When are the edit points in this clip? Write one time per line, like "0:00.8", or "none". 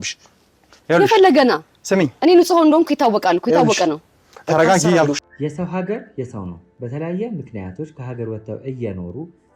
0:05.2